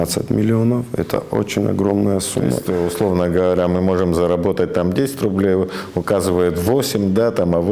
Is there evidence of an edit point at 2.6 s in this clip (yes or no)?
yes